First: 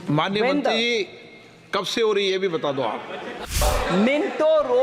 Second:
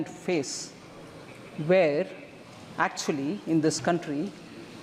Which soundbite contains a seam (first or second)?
first